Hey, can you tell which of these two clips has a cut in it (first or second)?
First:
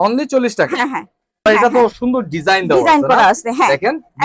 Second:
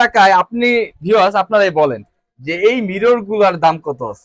first